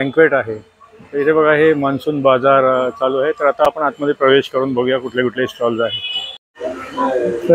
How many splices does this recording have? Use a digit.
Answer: 0